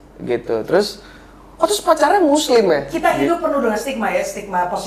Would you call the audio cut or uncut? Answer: cut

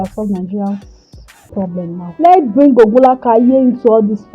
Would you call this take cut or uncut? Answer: cut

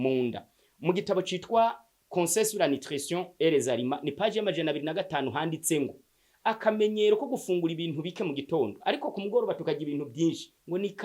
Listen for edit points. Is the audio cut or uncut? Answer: uncut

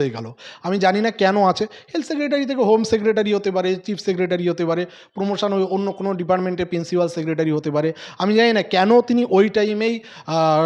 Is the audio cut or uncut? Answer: uncut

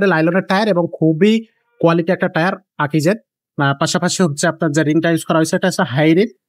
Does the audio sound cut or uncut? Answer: uncut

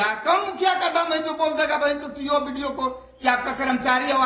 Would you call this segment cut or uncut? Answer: uncut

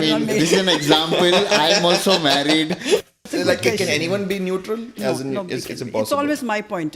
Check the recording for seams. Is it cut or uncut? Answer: cut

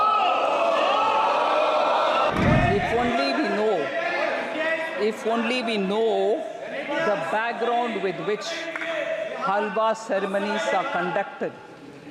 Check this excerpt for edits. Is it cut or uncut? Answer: cut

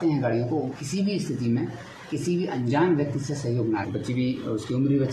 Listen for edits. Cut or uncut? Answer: cut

